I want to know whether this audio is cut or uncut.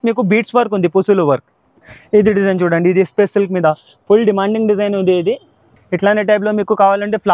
uncut